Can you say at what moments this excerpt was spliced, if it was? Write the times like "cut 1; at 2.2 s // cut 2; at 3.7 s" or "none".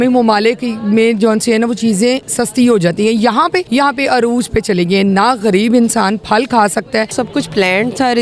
cut 1; at 2.3 s // cut 2; at 3.7 s // cut 3; at 7.1 s